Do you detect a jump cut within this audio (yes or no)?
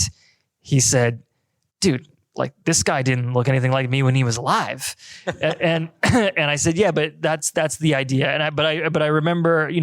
no